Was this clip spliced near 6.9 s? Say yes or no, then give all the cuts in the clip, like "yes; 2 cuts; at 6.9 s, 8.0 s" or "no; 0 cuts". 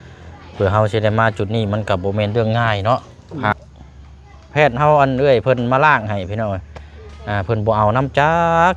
no; 1 cut; at 3.5 s